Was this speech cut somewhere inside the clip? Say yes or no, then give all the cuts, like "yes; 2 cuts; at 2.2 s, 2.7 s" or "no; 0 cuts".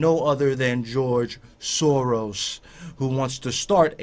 yes; 1 cut; at 2.6 s